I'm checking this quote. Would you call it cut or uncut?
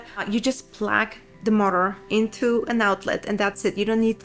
uncut